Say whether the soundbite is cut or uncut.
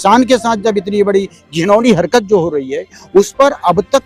uncut